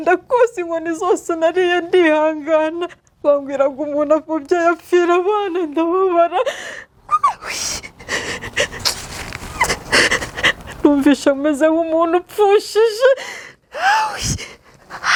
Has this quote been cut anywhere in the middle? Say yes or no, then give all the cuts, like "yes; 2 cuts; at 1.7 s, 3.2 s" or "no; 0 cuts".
no; 0 cuts